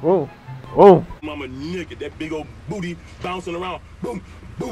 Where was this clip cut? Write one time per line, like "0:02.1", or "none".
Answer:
0:01.2